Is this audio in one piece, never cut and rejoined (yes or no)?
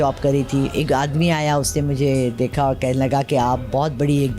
yes